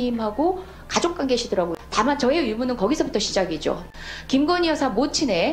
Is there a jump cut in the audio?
yes; 2 cuts; at 1.8 s, 3.9 s

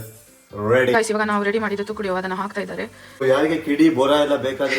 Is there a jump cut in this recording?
yes; 1 cut; at 3.0 s

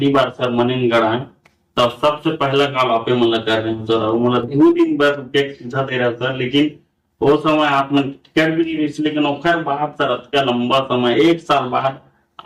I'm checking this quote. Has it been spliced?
no; 0 cuts

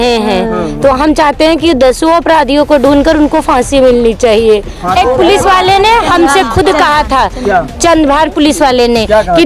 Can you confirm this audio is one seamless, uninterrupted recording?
no; 1 cut; at 4.9 s

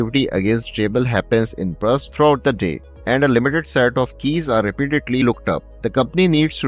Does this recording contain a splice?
yes; 2 cuts; at 2.9 s, 5.7 s

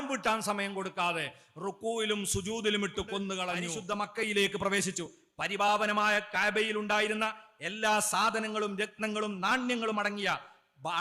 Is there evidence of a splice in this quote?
yes; 1 cut; at 3.7 s

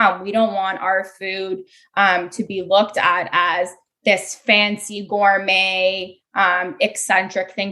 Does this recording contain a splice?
no; 0 cuts

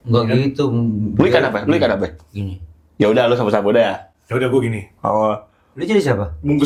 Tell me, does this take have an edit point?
no; 0 cuts

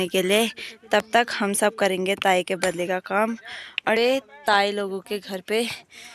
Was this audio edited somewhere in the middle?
yes; 1 cut; at 4.0 s

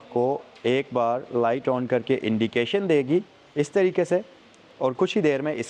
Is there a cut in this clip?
no; 0 cuts

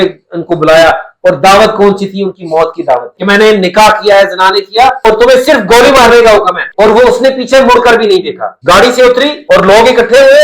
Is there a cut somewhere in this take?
yes; 2 cuts; at 3.1 s, 6.6 s

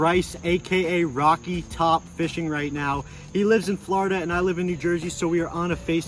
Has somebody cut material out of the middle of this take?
no; 0 cuts

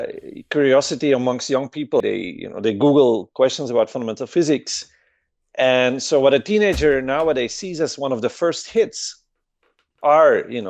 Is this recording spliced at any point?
yes; 1 cut; at 2.0 s

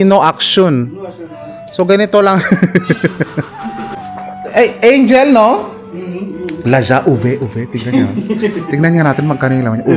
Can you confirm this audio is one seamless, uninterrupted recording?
no; 1 cut; at 3.9 s

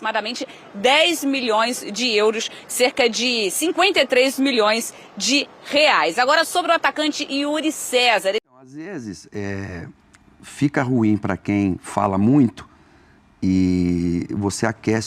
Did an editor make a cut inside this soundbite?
yes; 1 cut; at 8.5 s

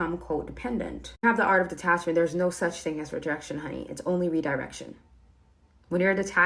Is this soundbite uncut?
no; 1 cut; at 1.2 s

